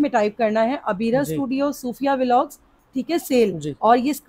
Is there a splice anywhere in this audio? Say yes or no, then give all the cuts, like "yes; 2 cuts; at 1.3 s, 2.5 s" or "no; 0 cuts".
no; 0 cuts